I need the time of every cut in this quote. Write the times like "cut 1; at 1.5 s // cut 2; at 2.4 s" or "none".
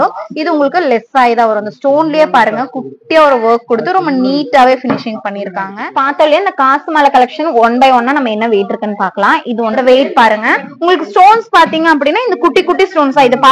cut 1; at 5.9 s // cut 2; at 9.8 s